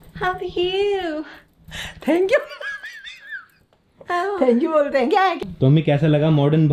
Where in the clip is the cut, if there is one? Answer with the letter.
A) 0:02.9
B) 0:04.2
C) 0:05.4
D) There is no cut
C